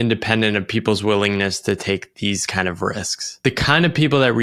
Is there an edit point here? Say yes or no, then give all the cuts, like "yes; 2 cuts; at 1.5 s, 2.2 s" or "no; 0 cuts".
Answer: yes; 1 cut; at 3.4 s